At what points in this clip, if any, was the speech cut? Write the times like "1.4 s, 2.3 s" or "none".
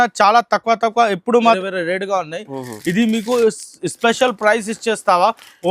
1.4 s